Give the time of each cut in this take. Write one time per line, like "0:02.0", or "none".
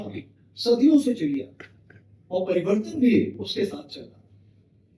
none